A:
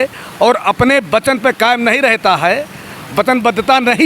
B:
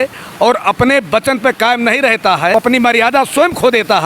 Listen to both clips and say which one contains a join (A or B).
B